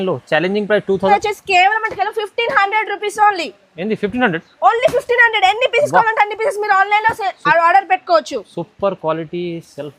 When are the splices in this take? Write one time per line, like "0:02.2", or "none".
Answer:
0:01.1